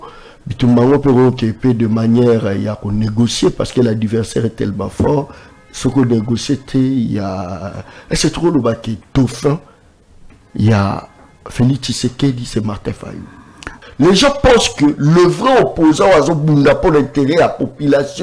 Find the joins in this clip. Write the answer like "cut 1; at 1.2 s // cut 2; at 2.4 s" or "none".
cut 1; at 13.7 s